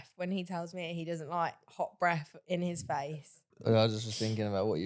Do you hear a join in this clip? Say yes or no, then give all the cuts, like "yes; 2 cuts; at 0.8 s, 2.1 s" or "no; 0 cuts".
yes; 1 cut; at 3.1 s